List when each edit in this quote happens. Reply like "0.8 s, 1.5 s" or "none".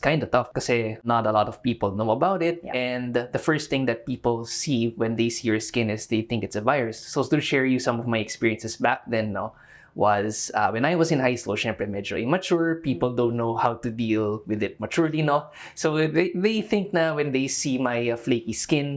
1.0 s